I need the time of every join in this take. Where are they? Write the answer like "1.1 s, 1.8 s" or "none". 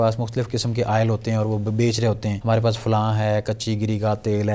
2.3 s